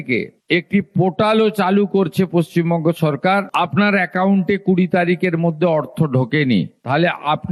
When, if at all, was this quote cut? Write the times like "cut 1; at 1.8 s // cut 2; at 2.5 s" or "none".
none